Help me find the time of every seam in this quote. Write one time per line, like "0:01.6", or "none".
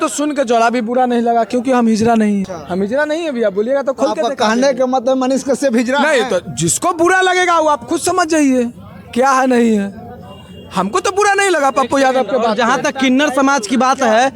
none

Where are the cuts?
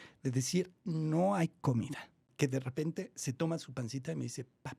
0:02.2

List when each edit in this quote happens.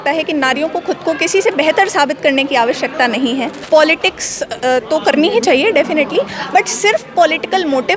0:03.5

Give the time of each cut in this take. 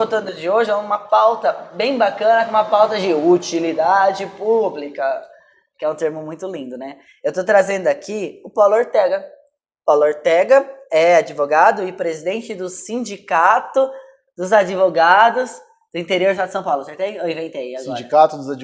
none

